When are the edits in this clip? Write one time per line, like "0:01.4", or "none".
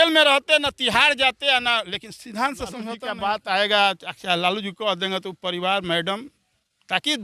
0:02.9